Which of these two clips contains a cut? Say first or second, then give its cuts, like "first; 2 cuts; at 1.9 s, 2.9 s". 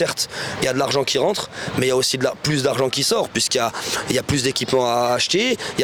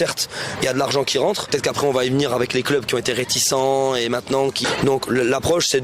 second; 2 cuts; at 1.5 s, 4.6 s